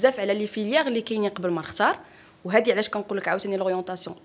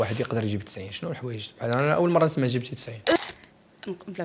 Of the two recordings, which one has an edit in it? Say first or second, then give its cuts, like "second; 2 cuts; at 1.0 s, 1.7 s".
second; 1 cut; at 3.2 s